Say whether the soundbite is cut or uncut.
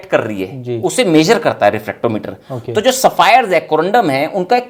uncut